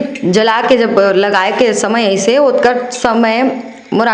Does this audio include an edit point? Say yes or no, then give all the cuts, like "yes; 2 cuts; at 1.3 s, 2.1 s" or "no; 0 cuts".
no; 0 cuts